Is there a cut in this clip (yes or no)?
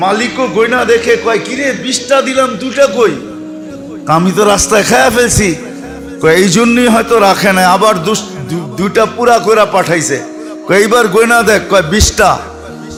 no